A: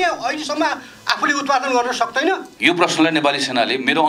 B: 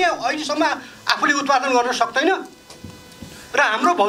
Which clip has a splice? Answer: A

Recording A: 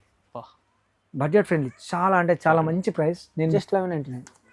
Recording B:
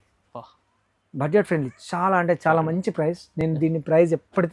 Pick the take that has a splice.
A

